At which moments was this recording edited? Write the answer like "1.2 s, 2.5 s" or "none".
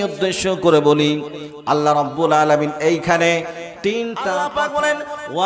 4.4 s